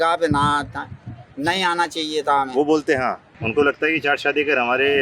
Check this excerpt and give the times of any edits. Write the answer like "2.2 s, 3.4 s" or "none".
3.3 s